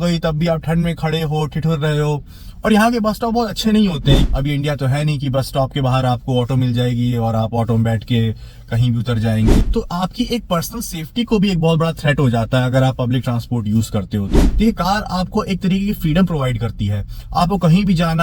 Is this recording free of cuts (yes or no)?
no